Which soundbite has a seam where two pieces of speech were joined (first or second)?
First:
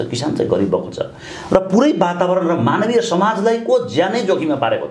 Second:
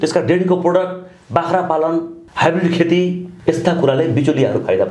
second